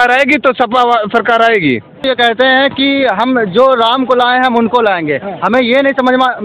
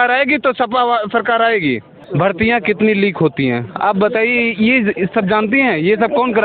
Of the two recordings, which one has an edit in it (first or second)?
first